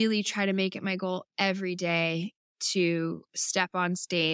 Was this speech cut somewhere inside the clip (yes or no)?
no